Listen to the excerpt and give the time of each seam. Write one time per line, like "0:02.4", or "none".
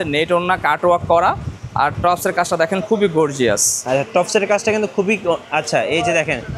none

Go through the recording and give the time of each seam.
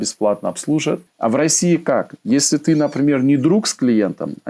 0:01.0

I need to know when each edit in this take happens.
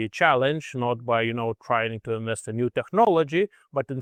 none

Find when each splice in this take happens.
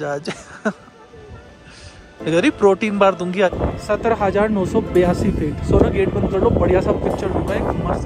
0:03.5

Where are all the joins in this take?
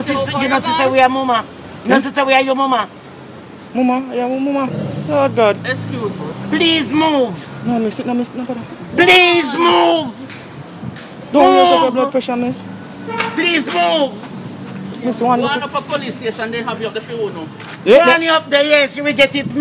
0:17.6

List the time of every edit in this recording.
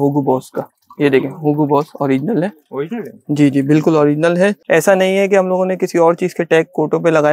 0:04.6

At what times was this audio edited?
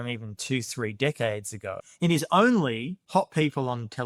0:01.9
0:02.9

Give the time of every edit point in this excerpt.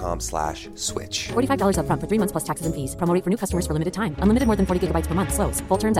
none

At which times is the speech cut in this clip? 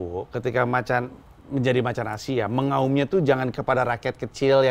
none

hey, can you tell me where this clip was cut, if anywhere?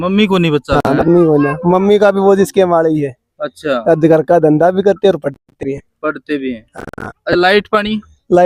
none

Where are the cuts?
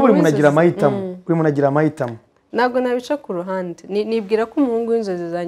none

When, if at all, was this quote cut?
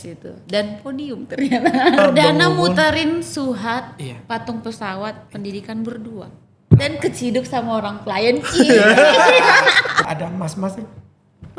0:02.0
0:10.1

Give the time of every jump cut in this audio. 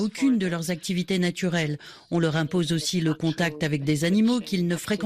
0:01.9

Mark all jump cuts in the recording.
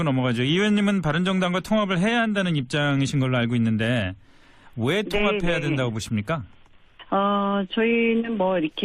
0:02.7

